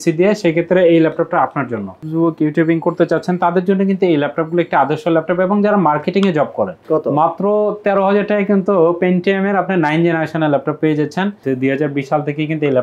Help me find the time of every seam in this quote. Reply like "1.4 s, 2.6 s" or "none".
2.0 s, 6.8 s, 11.4 s

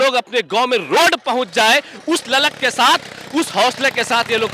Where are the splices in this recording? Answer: none

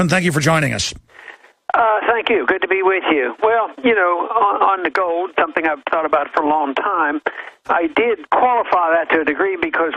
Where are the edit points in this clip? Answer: 6.4 s

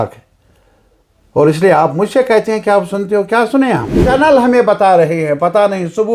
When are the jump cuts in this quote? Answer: 4.0 s

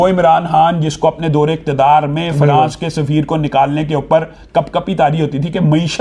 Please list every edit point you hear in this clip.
none

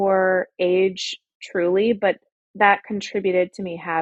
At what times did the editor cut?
none

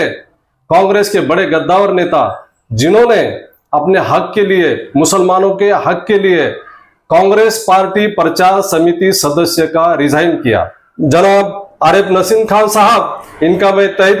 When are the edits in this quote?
10.8 s

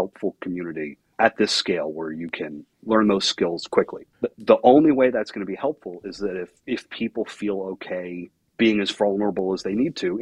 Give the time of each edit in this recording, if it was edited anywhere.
1.0 s, 2.7 s, 4.0 s, 6.6 s, 8.4 s

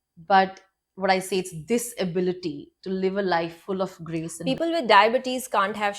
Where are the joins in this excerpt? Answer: 4.3 s

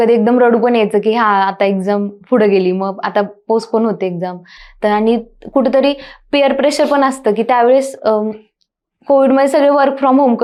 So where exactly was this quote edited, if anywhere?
none

